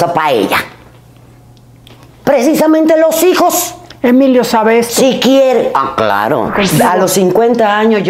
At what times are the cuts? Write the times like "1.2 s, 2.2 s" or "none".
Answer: 6.5 s